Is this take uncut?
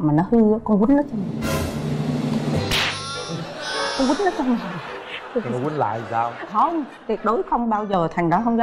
yes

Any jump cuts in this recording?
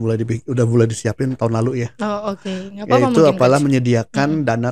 no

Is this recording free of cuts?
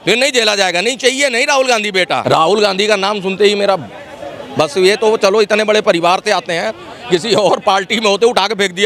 no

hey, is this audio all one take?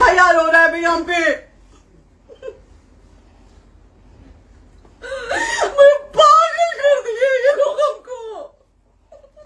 yes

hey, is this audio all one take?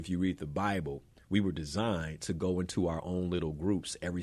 yes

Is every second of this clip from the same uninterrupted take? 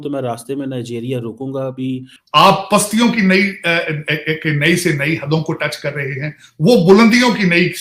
no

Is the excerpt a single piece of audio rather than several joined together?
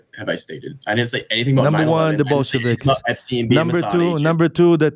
yes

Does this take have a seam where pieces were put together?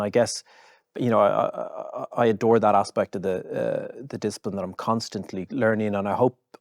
yes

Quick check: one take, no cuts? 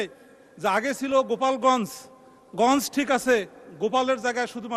yes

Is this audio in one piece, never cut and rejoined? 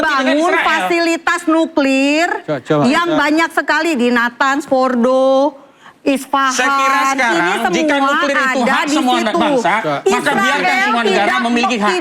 yes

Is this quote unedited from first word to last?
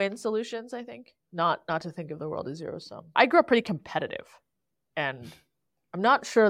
no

